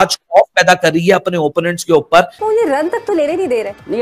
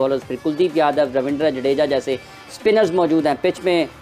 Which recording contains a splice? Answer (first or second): first